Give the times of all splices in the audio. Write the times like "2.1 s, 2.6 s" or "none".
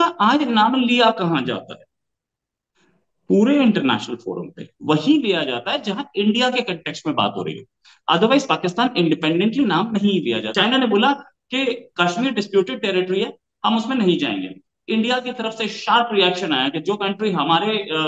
10.5 s